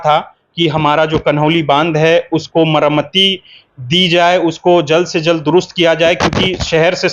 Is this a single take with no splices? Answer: yes; 0 cuts

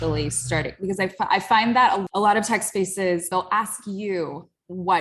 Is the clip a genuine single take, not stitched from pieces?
no; 2 cuts; at 2.0 s, 3.3 s

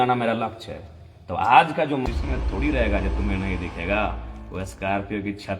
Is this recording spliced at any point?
yes; 1 cut; at 2.0 s

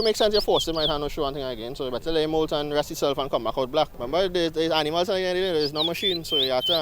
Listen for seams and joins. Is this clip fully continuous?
no; 1 cut; at 4.0 s

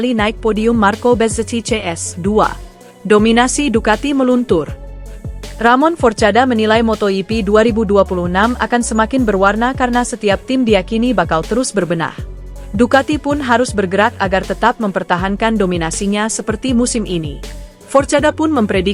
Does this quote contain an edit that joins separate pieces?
no; 0 cuts

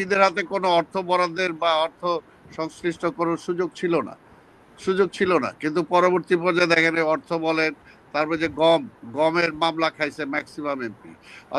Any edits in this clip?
no; 0 cuts

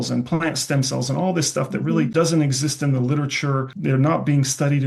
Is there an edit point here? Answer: yes; 2 cuts; at 2.1 s, 3.7 s

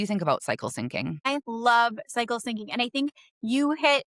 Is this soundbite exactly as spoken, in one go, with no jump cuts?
no; 1 cut; at 1.3 s

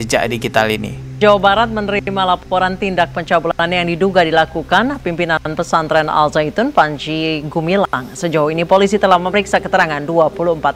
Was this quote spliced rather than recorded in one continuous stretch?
no; 0 cuts

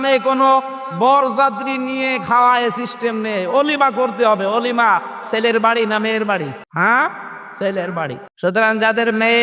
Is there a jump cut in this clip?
yes; 2 cuts; at 6.6 s, 8.2 s

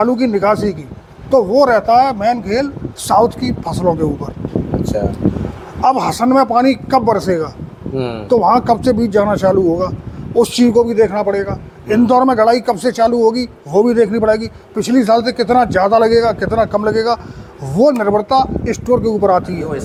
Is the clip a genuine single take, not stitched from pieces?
yes; 0 cuts

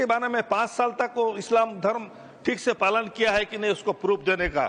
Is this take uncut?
yes; 0 cuts

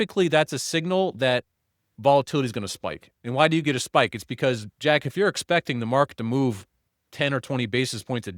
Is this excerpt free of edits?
no; 1 cut; at 3.0 s

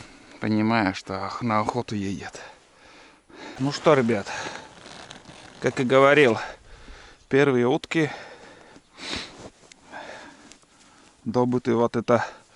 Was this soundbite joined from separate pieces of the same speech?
yes; 1 cut; at 3.5 s

